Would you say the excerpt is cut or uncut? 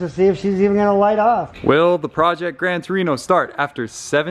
cut